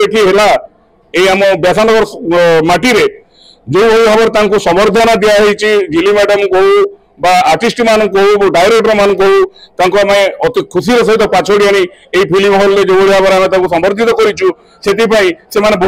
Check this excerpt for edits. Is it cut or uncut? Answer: uncut